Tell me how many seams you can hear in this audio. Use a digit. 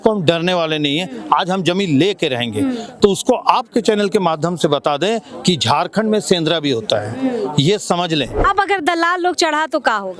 1